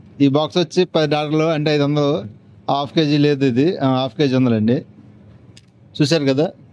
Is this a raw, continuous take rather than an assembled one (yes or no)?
yes